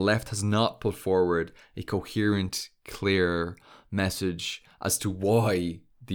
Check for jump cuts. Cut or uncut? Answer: uncut